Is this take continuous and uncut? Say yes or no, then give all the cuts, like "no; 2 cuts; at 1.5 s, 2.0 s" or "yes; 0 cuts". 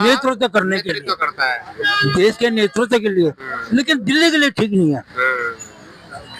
yes; 0 cuts